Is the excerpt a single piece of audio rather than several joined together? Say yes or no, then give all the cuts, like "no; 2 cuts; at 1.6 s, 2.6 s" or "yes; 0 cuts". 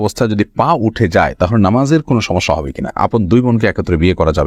no; 1 cut; at 3.0 s